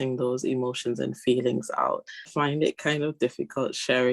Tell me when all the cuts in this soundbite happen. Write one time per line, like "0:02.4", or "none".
0:02.3